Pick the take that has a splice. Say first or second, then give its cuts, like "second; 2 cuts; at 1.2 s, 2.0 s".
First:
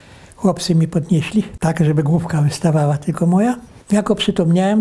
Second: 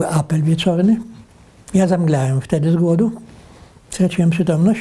first; 2 cuts; at 1.5 s, 3.7 s